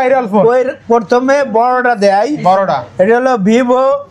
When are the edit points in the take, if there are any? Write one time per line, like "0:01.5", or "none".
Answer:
none